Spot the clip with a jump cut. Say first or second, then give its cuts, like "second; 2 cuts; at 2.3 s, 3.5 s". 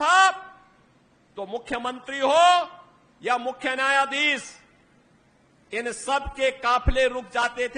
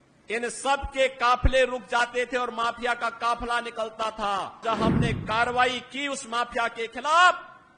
second; 1 cut; at 4.6 s